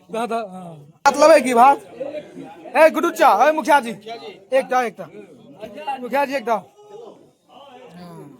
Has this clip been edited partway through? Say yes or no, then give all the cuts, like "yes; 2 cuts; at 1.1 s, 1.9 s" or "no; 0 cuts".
yes; 1 cut; at 1.1 s